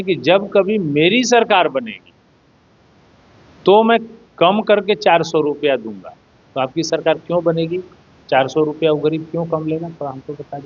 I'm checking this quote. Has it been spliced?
no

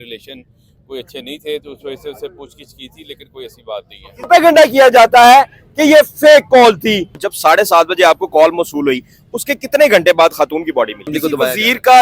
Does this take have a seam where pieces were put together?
yes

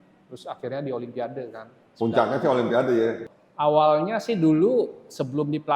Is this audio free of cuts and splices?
no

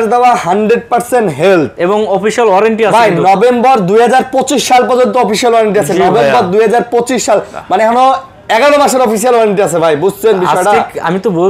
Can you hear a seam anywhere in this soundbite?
no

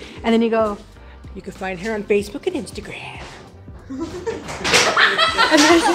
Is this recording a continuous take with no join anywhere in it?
yes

